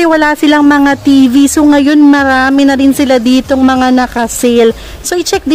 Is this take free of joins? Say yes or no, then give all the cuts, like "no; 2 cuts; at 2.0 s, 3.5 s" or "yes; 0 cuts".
yes; 0 cuts